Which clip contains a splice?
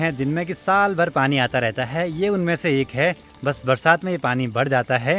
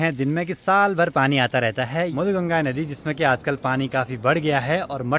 second; 1 cut; at 2.1 s

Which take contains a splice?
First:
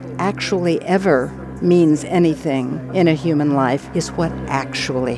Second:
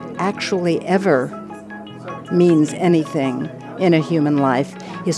first; 3 cuts; at 1.4 s, 2.8 s, 3.9 s

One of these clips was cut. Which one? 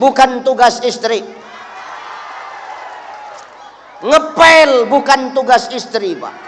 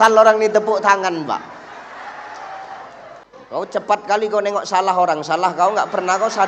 second; 1 cut; at 3.2 s

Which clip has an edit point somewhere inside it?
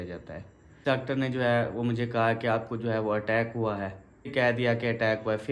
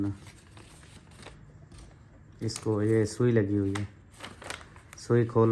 first; 2 cuts; at 0.8 s, 4.3 s

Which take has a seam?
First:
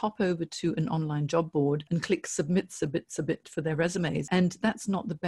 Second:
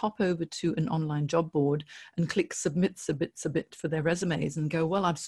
first; 2 cuts; at 1.8 s, 4.3 s

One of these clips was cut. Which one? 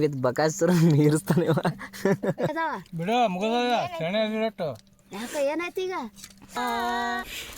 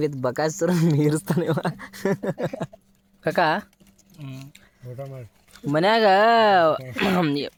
first; 2 cuts; at 2.5 s, 6.5 s

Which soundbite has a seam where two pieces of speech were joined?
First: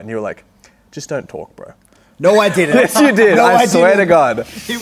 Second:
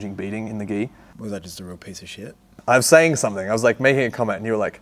second; 2 cuts; at 1.1 s, 2.5 s

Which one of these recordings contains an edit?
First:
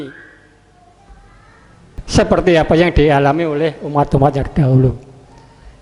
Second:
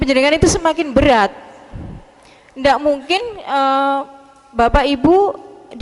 first; 1 cut; at 2.0 s

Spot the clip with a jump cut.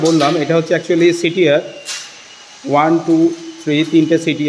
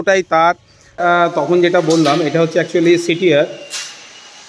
second; 1 cut; at 0.9 s

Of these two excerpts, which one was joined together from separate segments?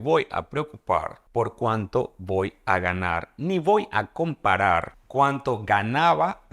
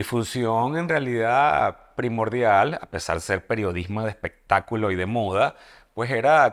first; 2 cuts; at 1.2 s, 5.0 s

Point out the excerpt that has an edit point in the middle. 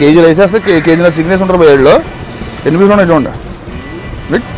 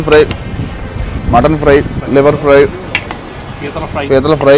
second; 1 cut; at 2.0 s

